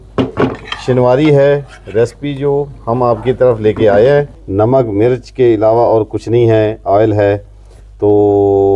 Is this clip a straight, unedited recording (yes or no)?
no